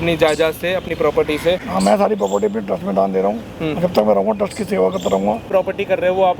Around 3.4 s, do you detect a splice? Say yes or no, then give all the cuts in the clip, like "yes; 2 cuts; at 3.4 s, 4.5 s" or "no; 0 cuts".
no; 2 cuts; at 1.7 s, 5.4 s